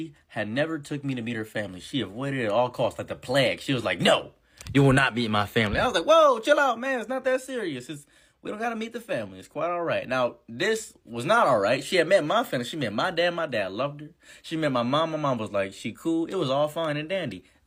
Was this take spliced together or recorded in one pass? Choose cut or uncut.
uncut